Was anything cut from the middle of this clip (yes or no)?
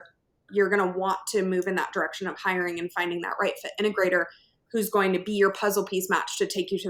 no